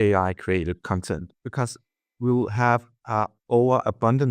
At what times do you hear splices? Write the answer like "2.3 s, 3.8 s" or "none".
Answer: 1.4 s